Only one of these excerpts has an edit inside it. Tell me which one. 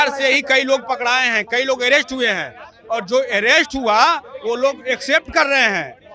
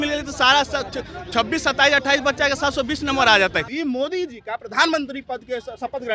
second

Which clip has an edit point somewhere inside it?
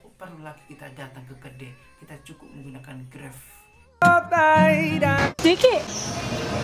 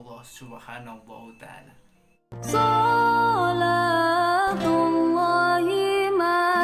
first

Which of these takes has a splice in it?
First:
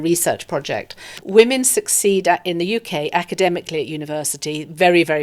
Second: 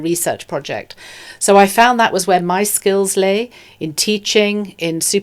first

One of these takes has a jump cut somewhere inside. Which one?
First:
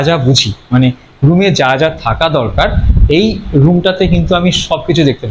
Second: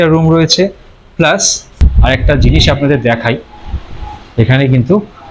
second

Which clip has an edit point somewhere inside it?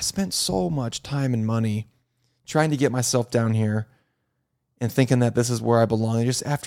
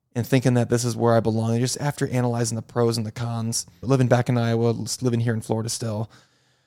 second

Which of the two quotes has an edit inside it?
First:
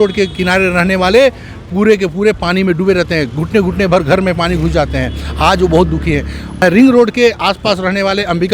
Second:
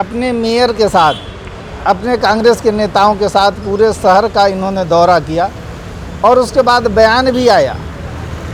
first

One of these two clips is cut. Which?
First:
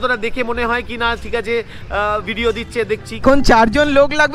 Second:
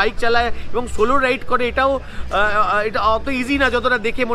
first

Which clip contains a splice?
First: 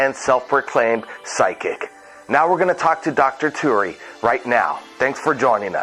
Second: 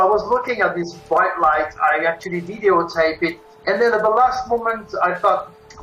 first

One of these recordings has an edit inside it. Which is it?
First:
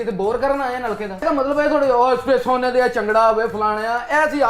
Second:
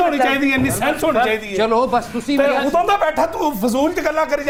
first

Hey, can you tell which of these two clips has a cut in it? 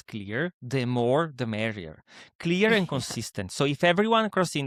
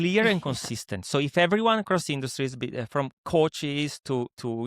second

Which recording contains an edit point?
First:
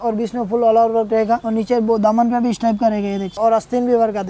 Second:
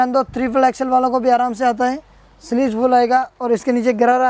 first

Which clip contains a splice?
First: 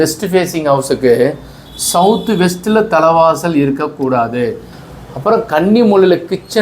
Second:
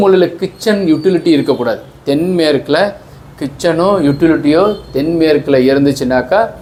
first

